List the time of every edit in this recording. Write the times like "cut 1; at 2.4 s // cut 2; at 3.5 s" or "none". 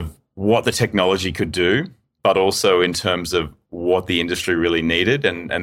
none